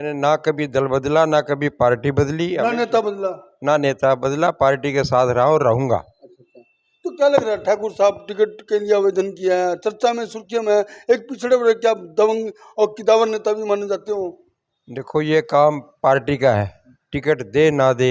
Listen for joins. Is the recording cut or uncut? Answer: uncut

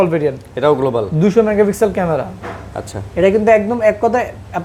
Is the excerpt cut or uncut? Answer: uncut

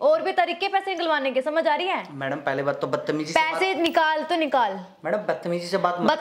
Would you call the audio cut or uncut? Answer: uncut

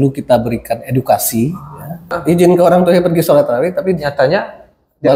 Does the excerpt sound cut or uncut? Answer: cut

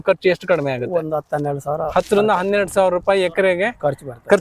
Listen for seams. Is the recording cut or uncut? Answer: uncut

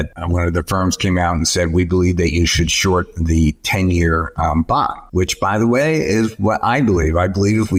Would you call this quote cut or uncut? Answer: uncut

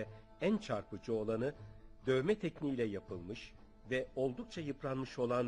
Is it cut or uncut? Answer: cut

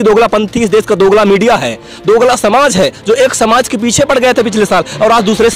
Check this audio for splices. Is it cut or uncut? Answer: uncut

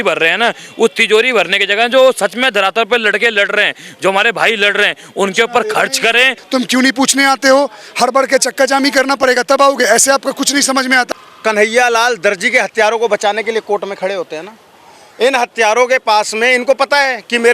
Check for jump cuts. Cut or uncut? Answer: cut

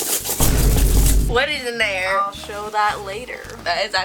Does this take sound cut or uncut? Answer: cut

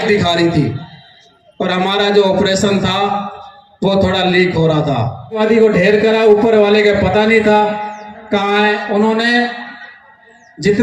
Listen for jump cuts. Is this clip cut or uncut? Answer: cut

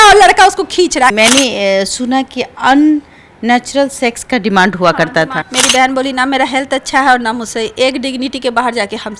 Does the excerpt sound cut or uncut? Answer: cut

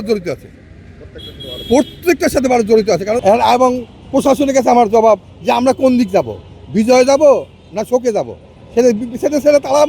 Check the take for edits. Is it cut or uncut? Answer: cut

